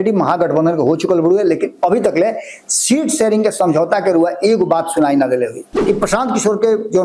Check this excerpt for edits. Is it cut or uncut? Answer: cut